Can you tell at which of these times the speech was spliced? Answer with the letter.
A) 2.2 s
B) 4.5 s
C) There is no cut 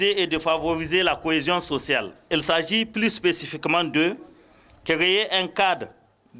A